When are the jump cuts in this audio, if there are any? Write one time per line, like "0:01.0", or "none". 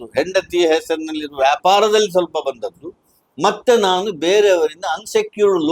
none

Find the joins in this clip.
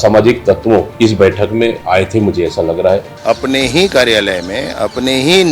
0:00.9
0:01.8
0:03.1

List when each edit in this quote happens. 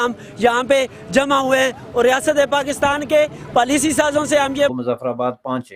none

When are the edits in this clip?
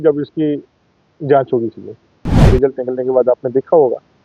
0:02.5

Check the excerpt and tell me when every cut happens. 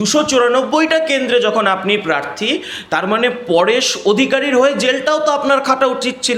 none

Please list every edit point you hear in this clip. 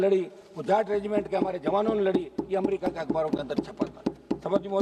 none

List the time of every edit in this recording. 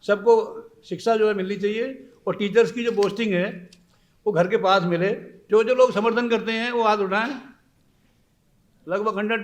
0:05.3

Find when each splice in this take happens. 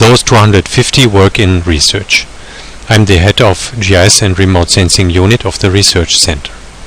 0:03.0

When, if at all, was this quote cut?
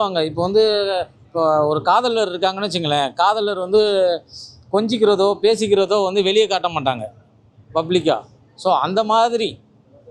none

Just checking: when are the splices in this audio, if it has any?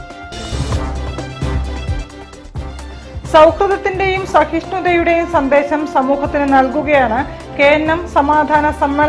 0:02.8

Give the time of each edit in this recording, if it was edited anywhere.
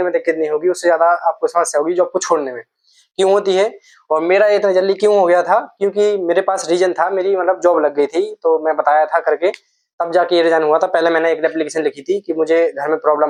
none

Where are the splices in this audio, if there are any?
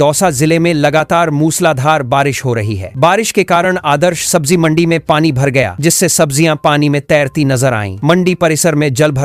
none

